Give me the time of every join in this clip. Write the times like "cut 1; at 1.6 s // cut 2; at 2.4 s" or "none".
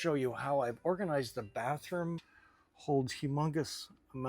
cut 1; at 2.3 s